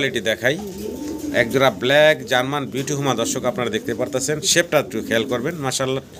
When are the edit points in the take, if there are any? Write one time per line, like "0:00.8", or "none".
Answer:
none